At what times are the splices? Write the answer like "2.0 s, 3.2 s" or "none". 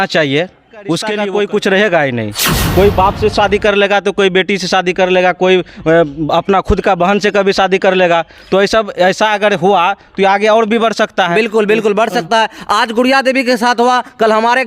1.1 s